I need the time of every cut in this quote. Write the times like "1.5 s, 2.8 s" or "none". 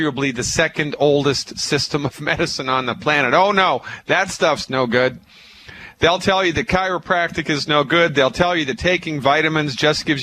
3.0 s